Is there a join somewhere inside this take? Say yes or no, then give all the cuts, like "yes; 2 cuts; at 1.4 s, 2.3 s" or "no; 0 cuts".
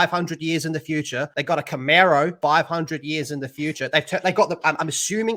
no; 0 cuts